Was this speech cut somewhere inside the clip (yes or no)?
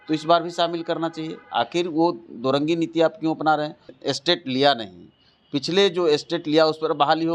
yes